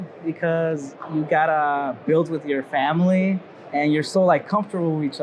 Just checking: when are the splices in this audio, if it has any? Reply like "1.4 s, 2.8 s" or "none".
0.9 s, 3.6 s